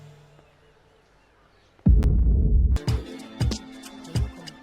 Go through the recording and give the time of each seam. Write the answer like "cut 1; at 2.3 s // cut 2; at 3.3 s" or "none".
cut 1; at 2.8 s